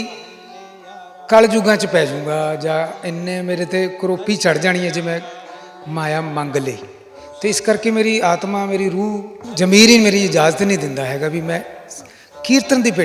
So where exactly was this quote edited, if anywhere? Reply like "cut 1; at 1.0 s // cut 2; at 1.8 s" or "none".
cut 1; at 9.4 s